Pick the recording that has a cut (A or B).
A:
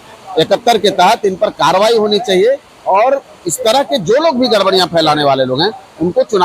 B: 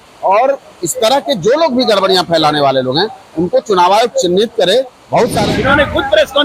B